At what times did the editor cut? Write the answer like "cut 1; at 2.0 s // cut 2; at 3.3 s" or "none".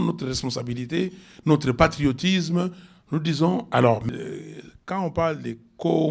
cut 1; at 4.0 s